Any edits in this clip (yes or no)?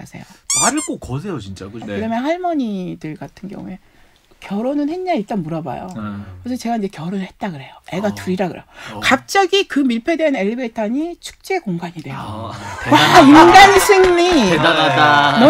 no